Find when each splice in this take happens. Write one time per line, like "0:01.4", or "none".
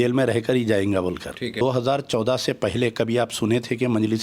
0:01.6